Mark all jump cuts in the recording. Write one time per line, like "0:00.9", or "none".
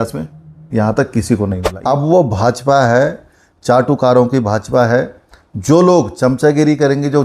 0:01.7